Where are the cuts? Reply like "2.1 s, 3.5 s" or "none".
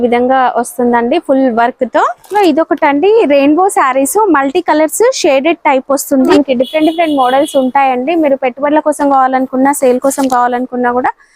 2.3 s, 6.3 s